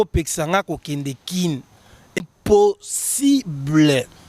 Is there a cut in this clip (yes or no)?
no